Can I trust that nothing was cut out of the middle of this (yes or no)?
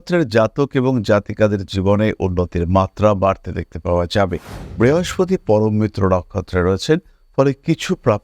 no